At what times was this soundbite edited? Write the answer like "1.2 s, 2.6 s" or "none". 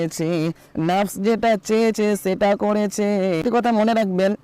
3.4 s

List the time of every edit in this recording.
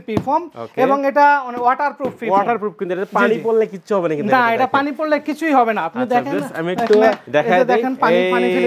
none

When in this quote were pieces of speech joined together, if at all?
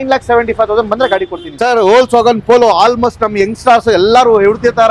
1.5 s

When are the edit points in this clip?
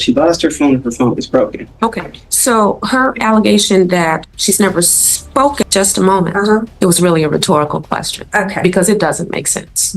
5.6 s

